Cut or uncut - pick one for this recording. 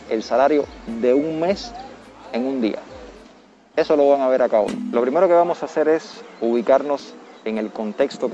uncut